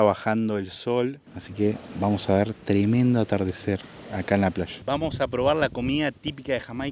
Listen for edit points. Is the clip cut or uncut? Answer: cut